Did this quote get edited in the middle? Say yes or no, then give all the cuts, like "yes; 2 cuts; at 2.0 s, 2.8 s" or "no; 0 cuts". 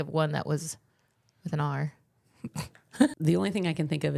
yes; 1 cut; at 3.1 s